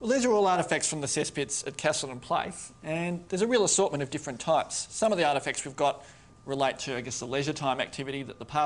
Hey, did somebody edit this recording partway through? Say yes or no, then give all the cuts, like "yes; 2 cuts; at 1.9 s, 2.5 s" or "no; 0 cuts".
yes; 1 cut; at 4.8 s